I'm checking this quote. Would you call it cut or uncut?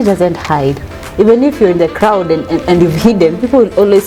uncut